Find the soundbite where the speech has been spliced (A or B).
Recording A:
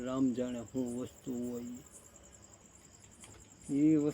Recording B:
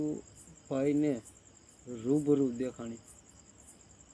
A